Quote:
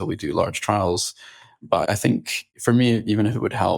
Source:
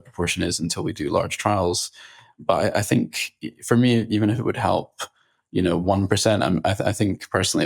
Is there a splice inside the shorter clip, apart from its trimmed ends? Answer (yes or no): yes